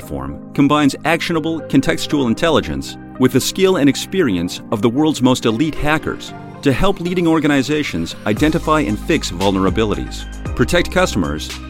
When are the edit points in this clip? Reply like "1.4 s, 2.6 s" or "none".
none